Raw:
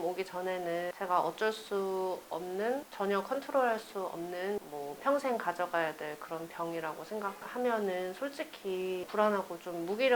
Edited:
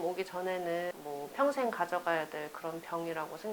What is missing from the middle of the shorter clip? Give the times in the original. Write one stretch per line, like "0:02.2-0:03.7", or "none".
0:01.0-0:04.7